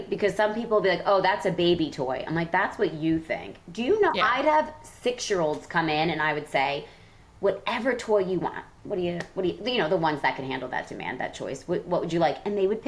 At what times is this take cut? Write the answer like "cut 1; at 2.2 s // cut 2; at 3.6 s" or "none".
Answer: none